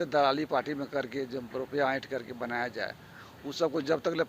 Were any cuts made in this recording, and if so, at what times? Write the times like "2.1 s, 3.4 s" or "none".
none